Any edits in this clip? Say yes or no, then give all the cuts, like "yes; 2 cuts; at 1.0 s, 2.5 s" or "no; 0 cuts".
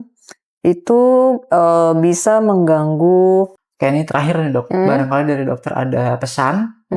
yes; 1 cut; at 3.5 s